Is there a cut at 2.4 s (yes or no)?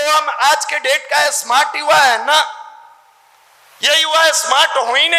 no